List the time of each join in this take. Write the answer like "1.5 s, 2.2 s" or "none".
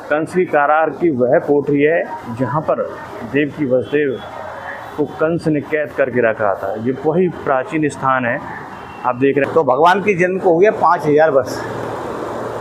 9.5 s